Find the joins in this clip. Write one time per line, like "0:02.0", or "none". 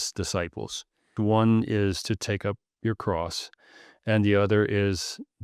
0:01.1